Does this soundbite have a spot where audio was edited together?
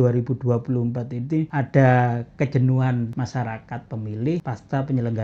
yes; 3 cuts; at 1.5 s, 3.1 s, 4.4 s

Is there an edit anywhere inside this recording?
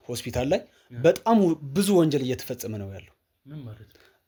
no; 0 cuts

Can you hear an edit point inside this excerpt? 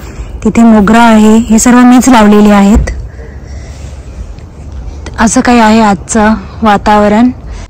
no; 0 cuts

